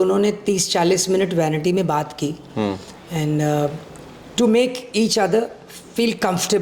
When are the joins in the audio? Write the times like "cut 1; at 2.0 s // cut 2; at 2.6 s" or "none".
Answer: none

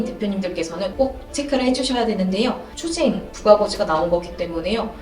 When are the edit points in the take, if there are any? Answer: cut 1; at 2.8 s

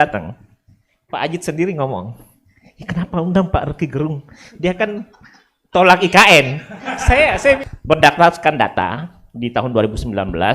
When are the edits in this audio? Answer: cut 1; at 7.6 s

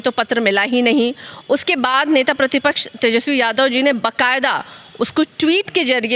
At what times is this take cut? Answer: none

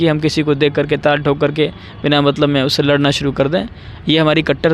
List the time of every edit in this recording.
none

